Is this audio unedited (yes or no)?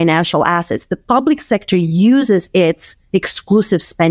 yes